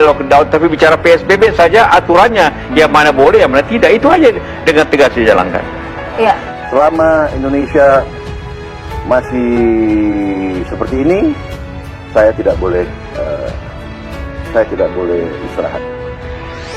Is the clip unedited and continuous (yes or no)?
no